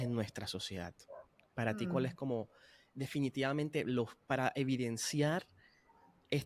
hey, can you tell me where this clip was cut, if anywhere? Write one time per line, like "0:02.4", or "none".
none